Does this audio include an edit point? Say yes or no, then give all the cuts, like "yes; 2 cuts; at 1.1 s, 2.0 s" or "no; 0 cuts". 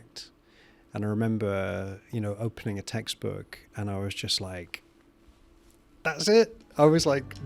no; 0 cuts